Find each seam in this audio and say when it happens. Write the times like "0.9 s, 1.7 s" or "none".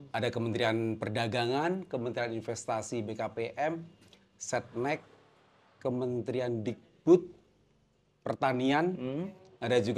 none